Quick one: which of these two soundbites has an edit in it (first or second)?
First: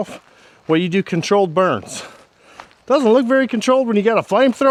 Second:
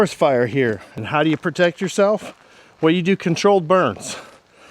second